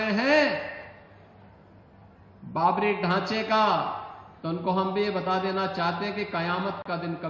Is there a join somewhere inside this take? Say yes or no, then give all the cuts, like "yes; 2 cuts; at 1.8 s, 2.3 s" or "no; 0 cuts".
no; 0 cuts